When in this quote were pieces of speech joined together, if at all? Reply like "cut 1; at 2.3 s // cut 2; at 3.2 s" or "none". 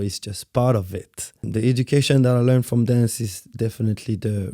cut 1; at 1.5 s